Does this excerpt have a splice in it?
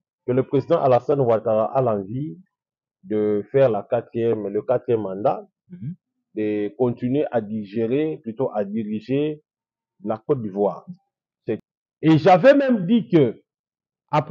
yes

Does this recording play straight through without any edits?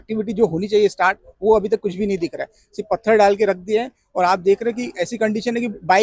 yes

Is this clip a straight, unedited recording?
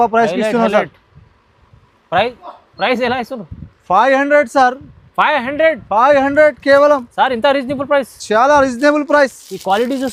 yes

